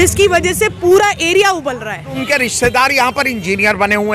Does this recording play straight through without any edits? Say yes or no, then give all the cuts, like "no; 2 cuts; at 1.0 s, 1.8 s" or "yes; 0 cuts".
no; 1 cut; at 2.2 s